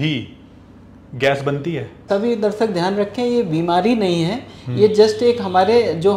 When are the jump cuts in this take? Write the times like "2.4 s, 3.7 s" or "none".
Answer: 2.1 s

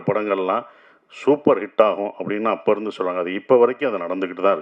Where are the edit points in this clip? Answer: none

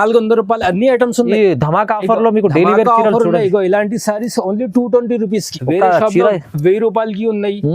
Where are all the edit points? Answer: 5.5 s

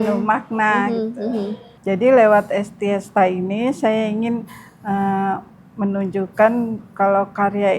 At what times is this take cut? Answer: 1.6 s

